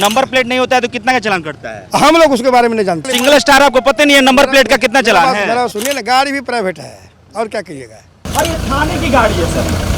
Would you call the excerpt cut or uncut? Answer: cut